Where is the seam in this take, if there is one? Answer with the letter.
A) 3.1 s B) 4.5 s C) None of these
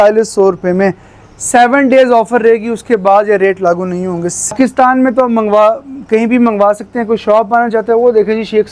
B